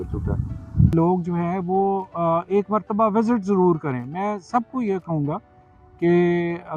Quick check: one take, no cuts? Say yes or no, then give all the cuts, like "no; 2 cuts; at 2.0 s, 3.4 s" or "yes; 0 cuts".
no; 1 cut; at 0.9 s